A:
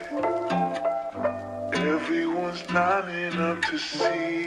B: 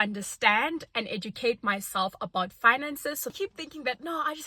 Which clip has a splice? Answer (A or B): B